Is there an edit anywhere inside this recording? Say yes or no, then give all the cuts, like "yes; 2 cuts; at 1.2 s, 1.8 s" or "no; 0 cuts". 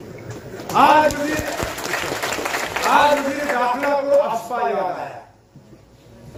no; 0 cuts